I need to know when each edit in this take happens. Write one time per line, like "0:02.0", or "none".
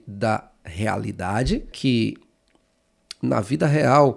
0:01.7